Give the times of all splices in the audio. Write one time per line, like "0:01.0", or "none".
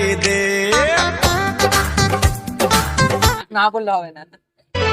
0:03.4